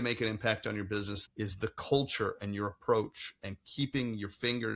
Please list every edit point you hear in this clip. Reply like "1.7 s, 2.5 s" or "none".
1.2 s